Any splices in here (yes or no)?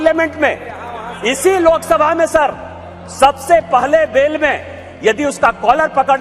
no